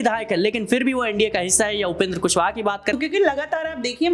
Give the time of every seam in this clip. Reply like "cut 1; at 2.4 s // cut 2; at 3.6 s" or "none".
cut 1; at 3.0 s